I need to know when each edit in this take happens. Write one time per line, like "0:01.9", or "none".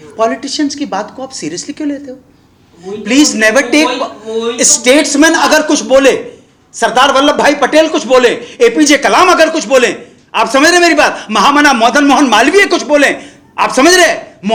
none